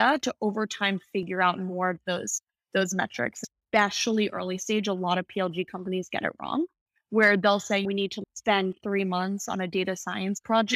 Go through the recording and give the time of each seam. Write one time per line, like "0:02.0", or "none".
0:03.4
0:07.9